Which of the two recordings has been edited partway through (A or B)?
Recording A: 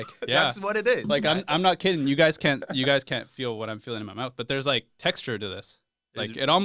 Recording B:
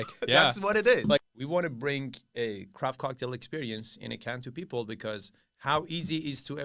B